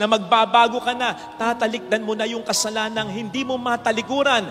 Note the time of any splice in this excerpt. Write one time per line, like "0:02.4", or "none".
none